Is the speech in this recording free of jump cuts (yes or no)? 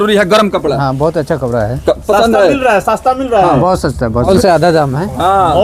no